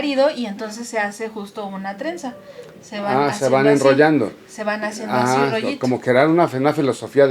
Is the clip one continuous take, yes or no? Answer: yes